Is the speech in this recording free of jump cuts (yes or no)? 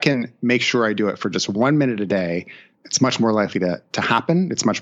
no